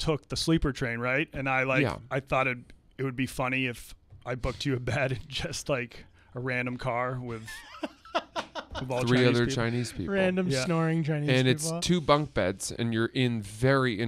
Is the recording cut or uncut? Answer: uncut